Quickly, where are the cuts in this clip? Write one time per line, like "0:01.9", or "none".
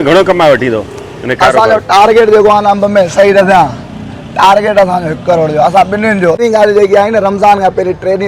0:06.4